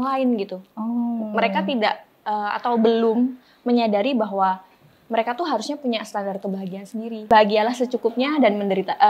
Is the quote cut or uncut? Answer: cut